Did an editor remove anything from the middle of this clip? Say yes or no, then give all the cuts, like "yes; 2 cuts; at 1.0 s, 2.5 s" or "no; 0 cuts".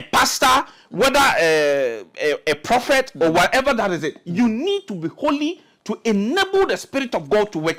no; 0 cuts